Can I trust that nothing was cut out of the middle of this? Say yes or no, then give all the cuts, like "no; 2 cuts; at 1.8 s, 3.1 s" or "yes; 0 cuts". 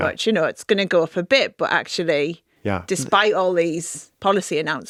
yes; 0 cuts